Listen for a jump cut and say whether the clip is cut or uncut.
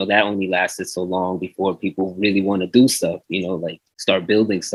uncut